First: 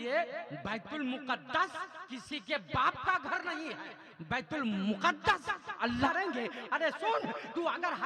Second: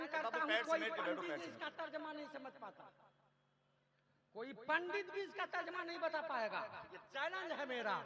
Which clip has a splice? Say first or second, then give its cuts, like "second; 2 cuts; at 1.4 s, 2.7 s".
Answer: first; 1 cut; at 6.1 s